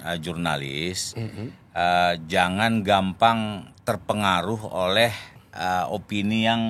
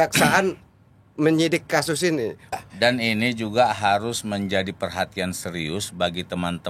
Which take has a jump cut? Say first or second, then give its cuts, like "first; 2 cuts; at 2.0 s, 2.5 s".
second; 1 cut; at 2.5 s